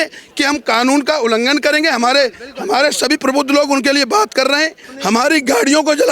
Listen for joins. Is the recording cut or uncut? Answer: cut